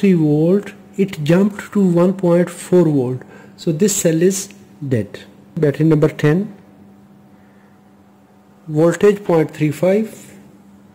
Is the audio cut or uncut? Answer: cut